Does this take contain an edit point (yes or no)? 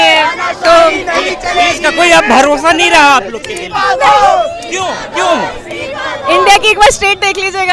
no